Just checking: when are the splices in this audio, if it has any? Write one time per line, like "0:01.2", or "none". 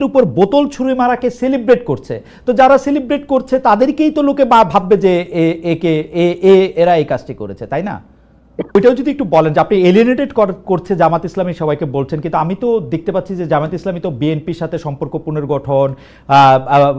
0:08.8